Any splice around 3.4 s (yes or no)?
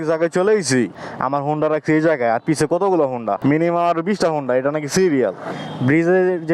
yes